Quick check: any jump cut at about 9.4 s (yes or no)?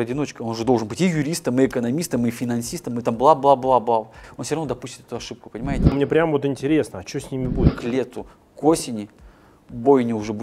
no